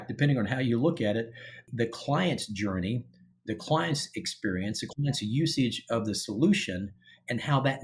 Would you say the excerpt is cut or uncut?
cut